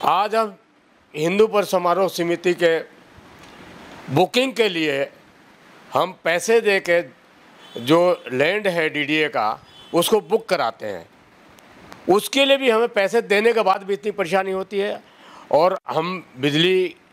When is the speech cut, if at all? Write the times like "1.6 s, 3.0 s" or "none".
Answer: none